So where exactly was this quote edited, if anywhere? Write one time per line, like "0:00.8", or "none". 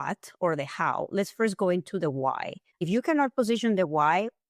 0:02.9